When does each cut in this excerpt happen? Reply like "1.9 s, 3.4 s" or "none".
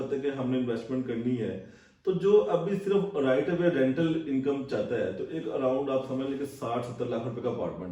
none